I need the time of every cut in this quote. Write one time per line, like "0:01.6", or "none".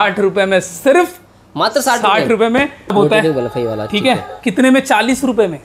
0:02.9